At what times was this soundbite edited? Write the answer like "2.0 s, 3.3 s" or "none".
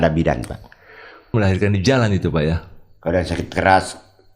1.3 s